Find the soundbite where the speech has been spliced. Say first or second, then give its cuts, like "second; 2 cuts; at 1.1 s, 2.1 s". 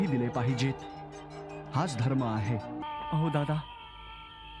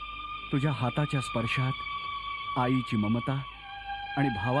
first; 1 cut; at 2.8 s